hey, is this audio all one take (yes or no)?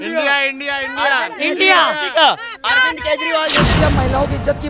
no